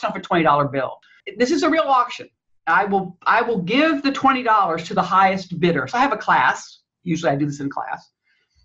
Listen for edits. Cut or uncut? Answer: cut